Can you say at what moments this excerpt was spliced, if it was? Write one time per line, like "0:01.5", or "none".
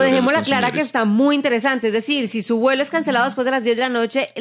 none